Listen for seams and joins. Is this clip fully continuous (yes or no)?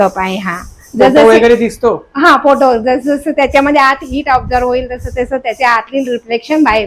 yes